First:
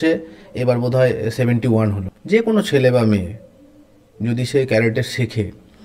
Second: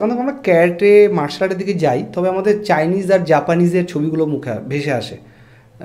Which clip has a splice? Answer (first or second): first